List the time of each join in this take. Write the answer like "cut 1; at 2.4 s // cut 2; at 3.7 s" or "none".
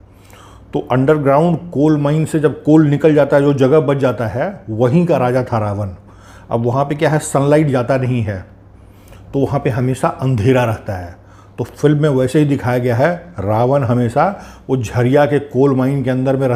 none